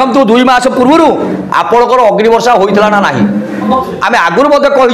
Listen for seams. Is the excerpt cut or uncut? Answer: cut